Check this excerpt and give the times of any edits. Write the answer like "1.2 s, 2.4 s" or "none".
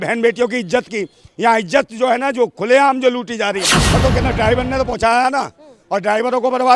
3.8 s